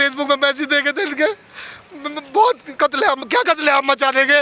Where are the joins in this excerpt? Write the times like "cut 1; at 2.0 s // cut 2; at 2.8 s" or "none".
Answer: none